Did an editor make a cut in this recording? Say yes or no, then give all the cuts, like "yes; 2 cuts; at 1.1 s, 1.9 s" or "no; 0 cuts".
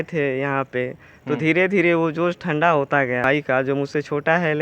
yes; 1 cut; at 3.2 s